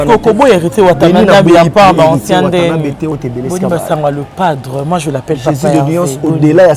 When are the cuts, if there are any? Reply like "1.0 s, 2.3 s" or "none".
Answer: 3.1 s